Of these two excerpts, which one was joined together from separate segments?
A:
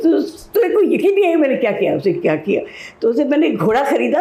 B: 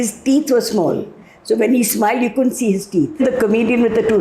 B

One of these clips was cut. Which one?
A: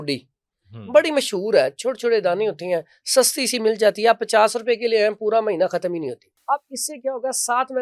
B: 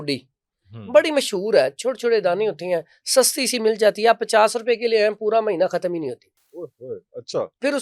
A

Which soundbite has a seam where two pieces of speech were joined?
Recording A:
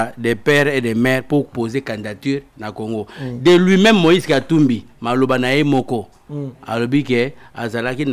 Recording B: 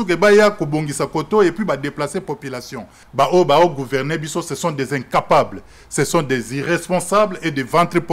B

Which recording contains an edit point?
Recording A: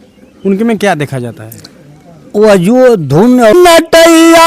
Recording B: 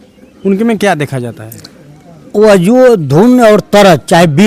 A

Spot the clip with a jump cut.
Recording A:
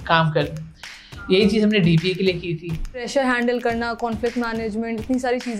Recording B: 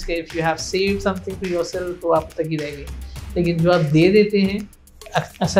A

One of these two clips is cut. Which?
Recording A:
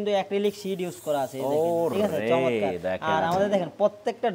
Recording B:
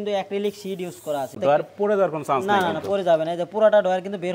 B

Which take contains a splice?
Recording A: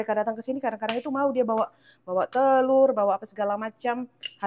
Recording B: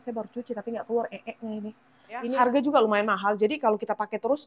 B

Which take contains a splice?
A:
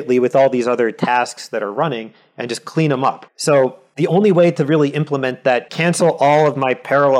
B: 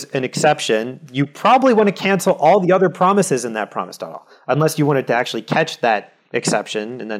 A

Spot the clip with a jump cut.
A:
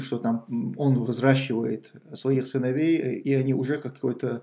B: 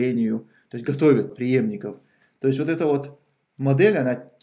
B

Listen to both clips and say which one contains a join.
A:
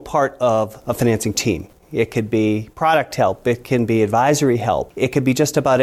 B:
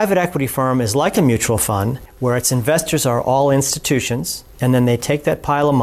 A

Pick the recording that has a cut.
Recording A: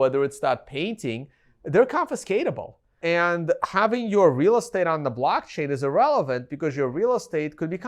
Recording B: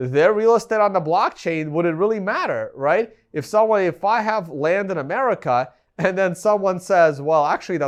A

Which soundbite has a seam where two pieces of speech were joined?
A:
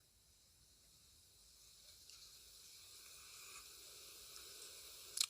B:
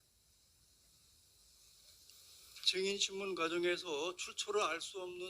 B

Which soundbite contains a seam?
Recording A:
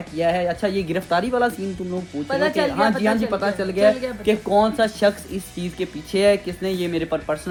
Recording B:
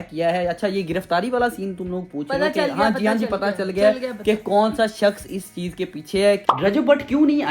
B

